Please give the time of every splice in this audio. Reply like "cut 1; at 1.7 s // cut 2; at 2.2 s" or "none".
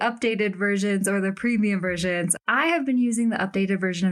cut 1; at 2.3 s